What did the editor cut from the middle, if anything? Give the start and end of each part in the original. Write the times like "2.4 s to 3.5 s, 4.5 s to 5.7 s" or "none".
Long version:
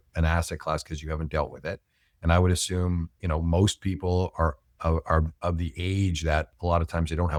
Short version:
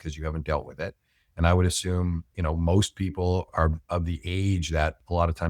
4.3 s to 5.0 s